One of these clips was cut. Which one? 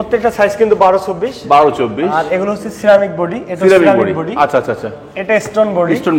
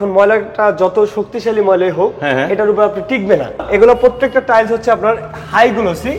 second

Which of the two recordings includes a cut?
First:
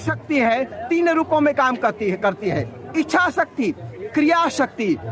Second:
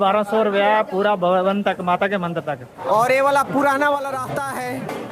second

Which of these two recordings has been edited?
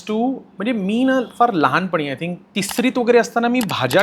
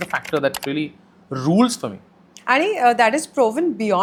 first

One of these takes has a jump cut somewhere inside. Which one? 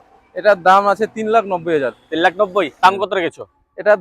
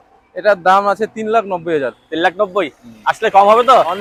first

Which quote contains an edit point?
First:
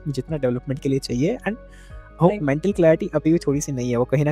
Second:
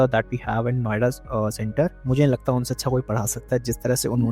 second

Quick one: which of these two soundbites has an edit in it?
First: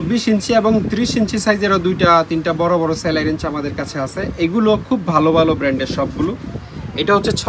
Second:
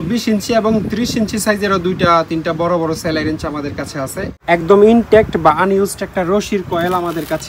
second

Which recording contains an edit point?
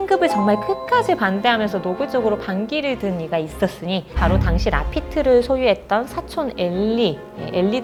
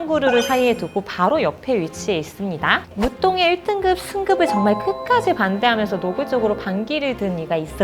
second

